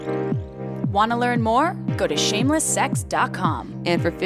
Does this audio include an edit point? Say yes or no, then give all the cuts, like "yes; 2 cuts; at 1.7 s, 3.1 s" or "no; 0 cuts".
yes; 1 cut; at 0.9 s